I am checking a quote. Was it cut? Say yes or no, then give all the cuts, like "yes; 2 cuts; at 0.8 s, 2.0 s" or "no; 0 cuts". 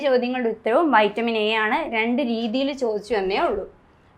no; 0 cuts